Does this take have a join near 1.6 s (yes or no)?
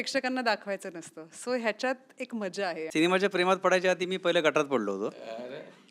no